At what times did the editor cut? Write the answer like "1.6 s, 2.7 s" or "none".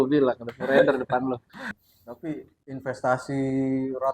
1.6 s